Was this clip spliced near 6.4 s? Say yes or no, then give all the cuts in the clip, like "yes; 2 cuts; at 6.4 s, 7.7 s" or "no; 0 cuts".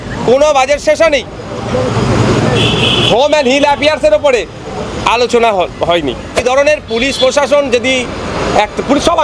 yes; 1 cut; at 6.4 s